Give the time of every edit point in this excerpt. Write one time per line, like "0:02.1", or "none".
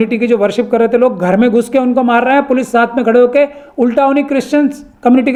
none